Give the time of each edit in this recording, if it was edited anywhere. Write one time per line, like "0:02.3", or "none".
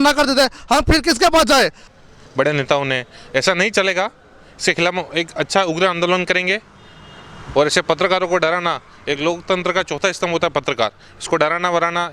0:01.8